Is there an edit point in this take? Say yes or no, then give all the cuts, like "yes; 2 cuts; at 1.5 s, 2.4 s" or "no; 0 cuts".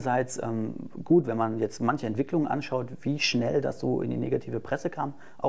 no; 0 cuts